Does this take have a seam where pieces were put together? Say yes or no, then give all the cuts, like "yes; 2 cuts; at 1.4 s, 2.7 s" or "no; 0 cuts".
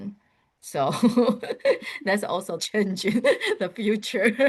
yes; 1 cut; at 2.5 s